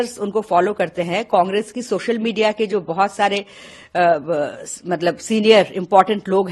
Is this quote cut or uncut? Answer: uncut